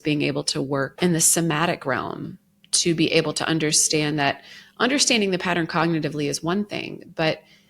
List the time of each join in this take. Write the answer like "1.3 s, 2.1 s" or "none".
0.9 s